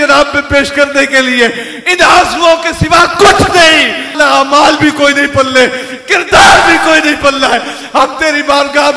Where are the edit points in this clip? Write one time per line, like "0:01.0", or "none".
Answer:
0:04.1